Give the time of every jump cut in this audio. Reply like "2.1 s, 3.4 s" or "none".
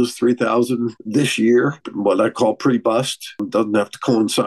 1.0 s, 1.8 s, 3.5 s

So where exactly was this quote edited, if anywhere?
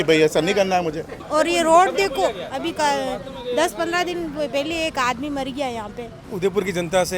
1.1 s, 6.3 s

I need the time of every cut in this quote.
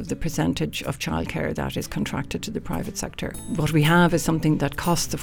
3.4 s

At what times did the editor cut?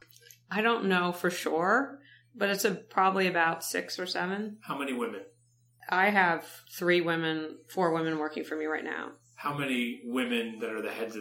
5.8 s, 6.6 s

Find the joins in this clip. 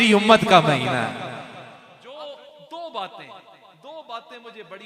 2.4 s

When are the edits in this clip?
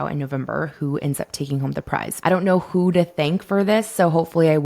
2.1 s

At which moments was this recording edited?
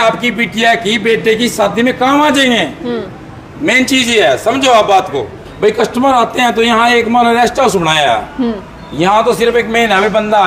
5.4 s

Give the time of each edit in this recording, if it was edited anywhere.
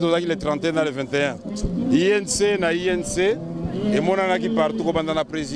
none

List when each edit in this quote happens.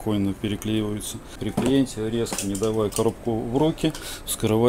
1.4 s

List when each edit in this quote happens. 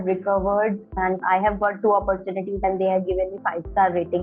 1.0 s, 2.6 s

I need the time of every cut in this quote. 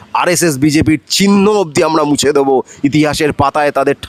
none

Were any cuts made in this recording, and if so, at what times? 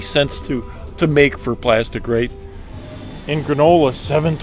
2.6 s

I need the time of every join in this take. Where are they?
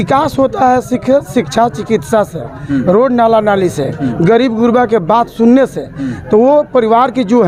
none

